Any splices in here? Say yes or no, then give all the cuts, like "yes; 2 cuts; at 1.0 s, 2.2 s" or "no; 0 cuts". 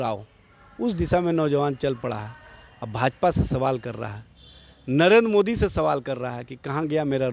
no; 0 cuts